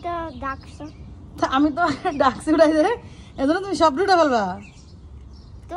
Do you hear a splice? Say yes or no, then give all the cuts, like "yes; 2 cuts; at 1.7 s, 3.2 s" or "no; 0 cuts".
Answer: no; 0 cuts